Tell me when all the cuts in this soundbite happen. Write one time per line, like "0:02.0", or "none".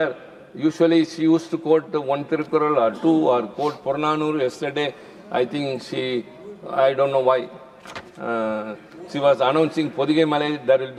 none